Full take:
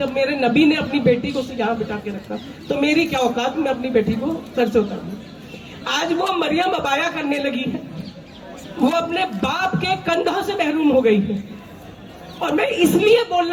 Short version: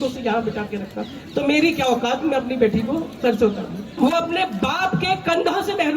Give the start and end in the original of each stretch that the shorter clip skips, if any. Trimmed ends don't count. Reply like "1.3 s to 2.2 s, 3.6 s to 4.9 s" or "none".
5.1 s to 8.6 s

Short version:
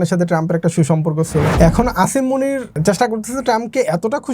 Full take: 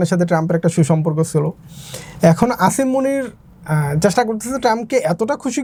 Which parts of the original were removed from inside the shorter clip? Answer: 1.5 s to 2.1 s, 3.4 s to 3.9 s

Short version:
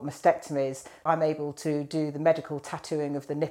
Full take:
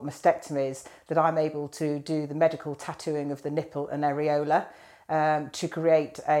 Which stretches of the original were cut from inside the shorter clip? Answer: 1.1 s to 1.2 s

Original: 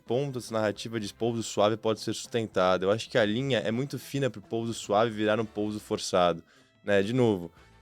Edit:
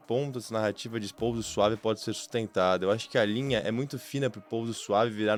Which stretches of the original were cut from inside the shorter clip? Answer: none

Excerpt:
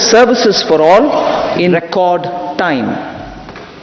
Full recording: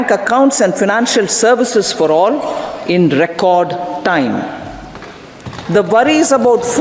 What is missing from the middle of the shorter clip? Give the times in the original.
3.0 s to 3.2 s

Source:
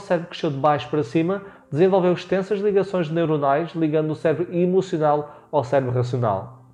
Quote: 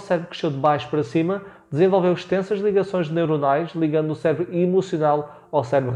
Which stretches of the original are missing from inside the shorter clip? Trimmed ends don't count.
none

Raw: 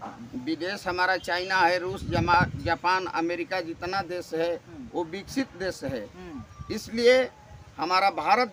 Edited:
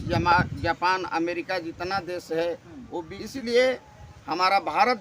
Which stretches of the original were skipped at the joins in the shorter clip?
5.2 s to 6.7 s

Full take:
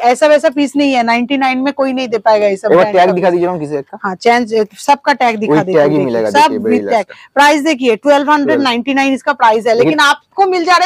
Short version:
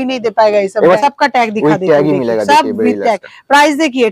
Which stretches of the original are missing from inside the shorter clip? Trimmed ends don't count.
2.9 s to 4.9 s

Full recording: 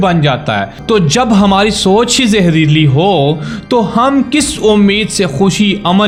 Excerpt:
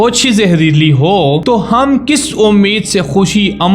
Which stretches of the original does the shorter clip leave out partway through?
3.4 s to 3.7 s

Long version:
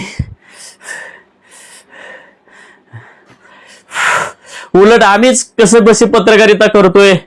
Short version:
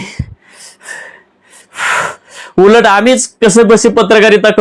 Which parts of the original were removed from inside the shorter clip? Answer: 1.6 s to 3.8 s

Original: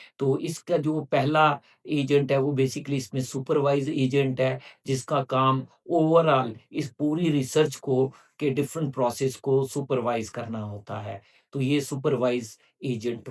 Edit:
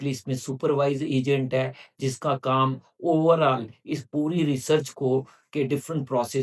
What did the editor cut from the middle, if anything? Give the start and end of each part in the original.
none

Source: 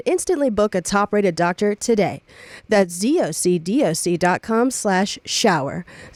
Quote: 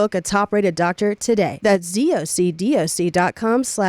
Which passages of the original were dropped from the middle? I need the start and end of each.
2.1 s to 2.6 s

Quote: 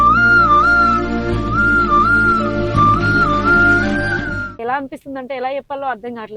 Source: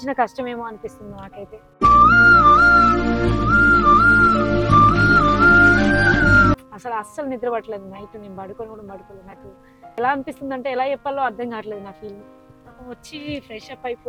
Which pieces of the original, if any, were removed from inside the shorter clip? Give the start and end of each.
6.3 s to 9.7 s

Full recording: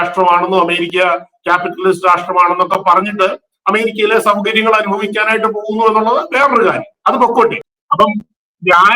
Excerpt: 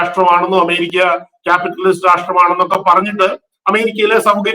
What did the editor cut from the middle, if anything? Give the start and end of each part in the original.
none

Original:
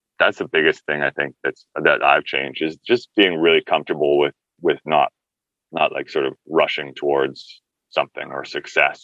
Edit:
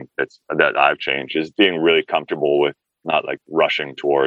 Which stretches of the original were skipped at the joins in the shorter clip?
2.7 s to 3.1 s, 4.7 s to 6.1 s

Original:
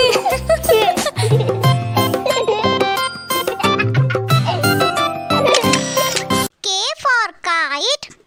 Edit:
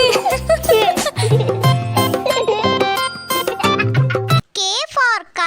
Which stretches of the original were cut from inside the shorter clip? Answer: 4.4 s to 6.5 s

